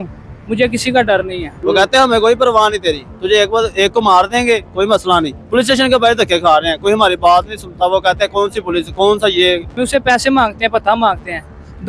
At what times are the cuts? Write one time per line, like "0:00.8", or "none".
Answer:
0:01.5
0:05.4
0:09.7